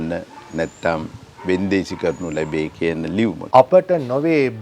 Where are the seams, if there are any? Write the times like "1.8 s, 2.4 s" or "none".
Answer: 3.4 s